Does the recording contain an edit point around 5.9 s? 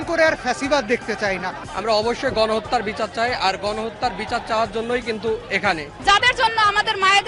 yes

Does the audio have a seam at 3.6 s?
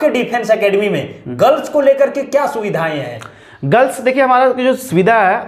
no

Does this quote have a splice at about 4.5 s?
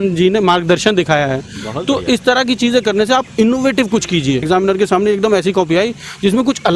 yes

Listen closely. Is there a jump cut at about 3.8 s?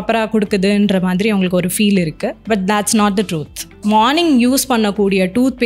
yes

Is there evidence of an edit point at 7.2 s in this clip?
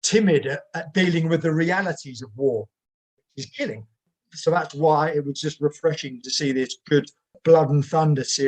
yes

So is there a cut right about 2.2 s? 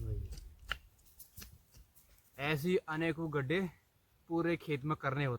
yes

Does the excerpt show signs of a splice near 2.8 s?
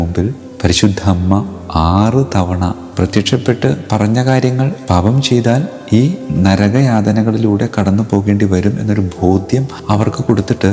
yes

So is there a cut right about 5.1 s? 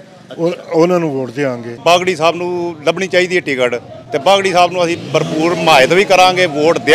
no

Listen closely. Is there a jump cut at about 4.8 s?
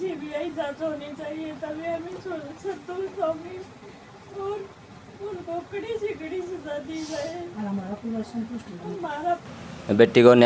no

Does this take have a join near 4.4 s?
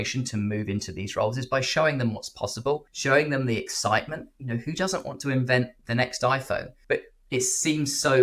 no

